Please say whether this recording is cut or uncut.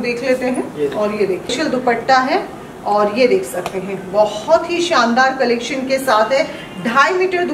cut